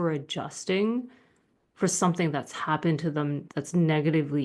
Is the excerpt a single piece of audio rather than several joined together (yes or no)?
no